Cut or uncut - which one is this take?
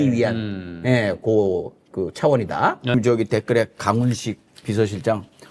cut